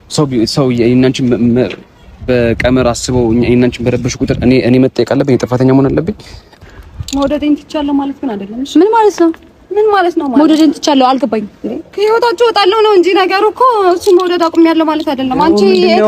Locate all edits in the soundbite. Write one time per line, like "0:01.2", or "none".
0:06.6